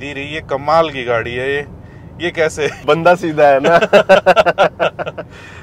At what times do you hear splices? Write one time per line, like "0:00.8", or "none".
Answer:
none